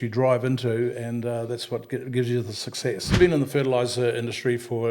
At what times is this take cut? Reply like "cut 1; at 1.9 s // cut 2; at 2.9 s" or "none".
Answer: cut 1; at 3.2 s

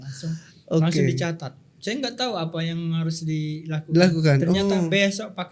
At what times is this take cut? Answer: none

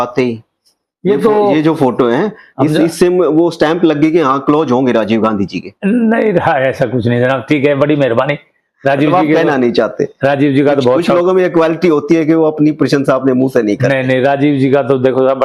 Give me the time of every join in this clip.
none

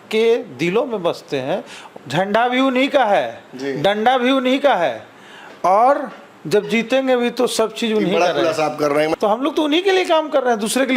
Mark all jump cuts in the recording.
cut 1; at 1.8 s // cut 2; at 9.1 s

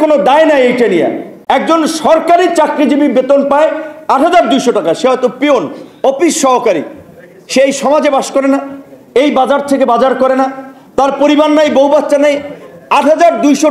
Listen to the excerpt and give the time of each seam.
cut 1; at 1.3 s

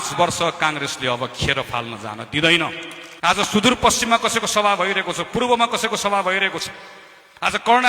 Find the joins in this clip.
cut 1; at 3.2 s

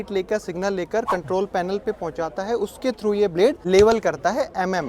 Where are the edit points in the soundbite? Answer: cut 1; at 3.6 s

